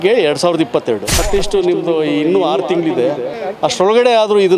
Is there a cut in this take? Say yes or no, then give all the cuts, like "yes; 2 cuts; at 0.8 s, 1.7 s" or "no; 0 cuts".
yes; 1 cut; at 1.1 s